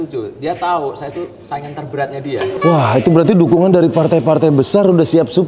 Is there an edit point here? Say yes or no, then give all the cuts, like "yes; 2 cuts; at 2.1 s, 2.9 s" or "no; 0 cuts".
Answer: yes; 1 cut; at 2.5 s